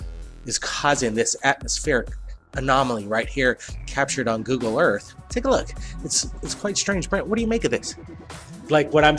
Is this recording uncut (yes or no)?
no